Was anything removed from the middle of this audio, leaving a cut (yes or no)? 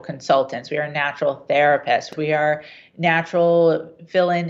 yes